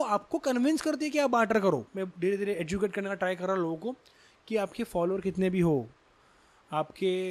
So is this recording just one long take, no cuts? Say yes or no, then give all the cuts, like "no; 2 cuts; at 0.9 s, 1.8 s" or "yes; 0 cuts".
yes; 0 cuts